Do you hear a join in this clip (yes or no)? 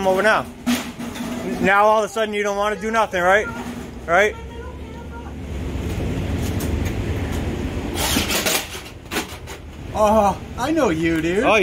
no